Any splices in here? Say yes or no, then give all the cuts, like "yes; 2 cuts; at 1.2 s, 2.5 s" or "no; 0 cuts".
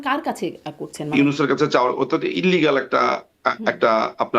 yes; 1 cut; at 1.1 s